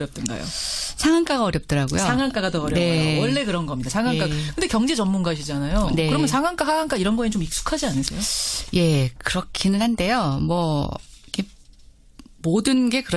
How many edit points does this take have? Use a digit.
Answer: 1